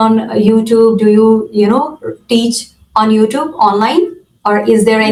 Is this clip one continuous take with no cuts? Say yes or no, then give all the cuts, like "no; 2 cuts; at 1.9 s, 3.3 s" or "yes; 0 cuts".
yes; 0 cuts